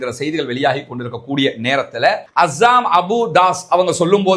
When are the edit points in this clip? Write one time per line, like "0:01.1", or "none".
0:02.3